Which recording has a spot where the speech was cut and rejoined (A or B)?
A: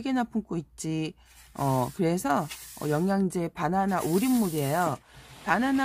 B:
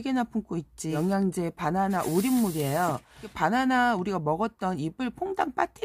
B